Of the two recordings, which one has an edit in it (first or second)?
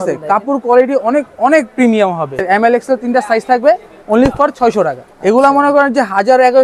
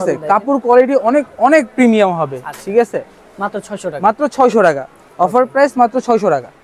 first